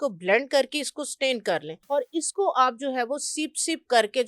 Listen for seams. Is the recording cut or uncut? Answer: cut